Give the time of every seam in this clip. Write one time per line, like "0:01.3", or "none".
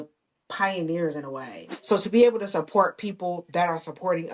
0:01.7